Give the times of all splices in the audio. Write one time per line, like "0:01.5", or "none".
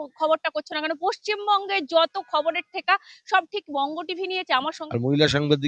0:04.8